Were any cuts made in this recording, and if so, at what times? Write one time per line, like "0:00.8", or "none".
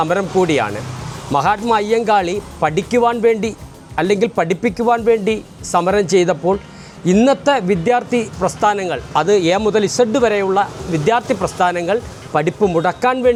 none